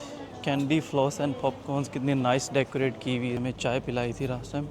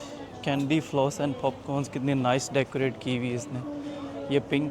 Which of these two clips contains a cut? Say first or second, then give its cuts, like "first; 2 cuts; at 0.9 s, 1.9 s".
first; 1 cut; at 3.4 s